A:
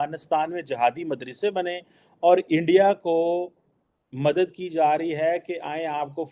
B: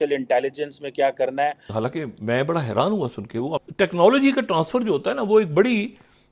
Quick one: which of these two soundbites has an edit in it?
B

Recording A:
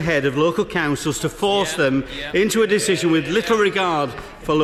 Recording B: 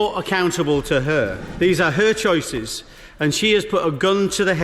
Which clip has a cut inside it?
B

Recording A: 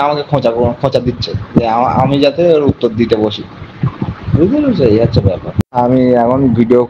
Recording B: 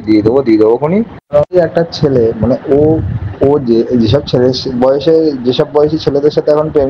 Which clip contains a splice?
B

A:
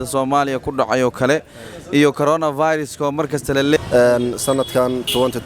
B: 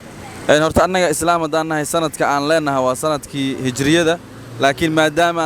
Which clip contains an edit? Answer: A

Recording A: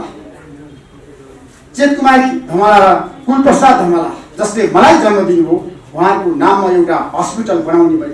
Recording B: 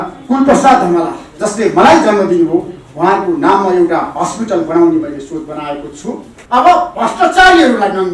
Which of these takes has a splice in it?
B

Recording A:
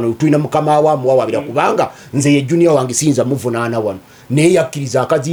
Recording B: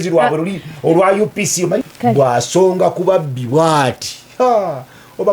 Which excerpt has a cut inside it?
B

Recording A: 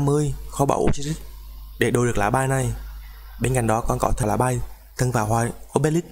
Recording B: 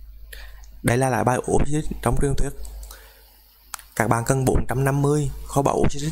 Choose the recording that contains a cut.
A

